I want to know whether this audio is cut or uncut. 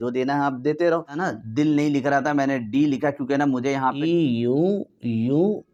uncut